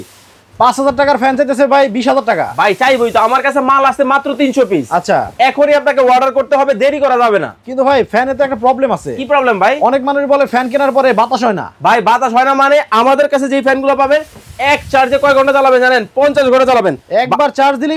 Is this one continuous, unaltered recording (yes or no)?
yes